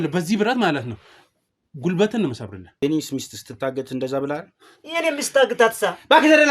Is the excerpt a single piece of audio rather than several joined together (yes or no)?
no